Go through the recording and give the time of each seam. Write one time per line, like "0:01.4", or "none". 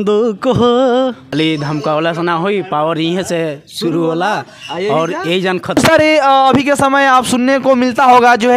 0:01.2
0:05.8